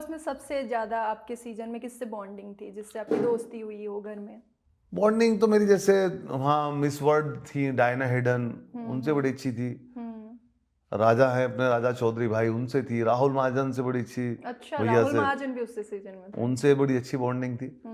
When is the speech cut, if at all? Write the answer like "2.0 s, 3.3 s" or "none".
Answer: none